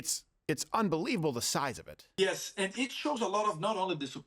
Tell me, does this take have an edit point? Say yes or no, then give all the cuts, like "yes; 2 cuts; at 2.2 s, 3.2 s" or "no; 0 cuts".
yes; 1 cut; at 2.1 s